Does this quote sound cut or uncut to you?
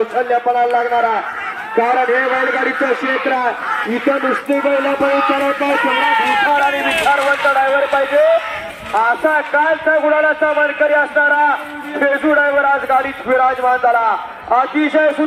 uncut